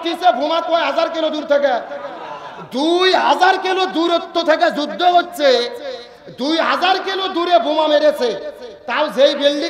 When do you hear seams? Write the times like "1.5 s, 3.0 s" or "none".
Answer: none